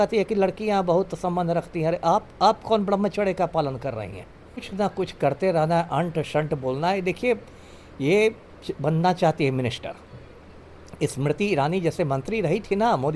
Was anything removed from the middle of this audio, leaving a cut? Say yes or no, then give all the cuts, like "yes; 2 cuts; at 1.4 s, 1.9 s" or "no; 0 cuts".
yes; 1 cut; at 4.7 s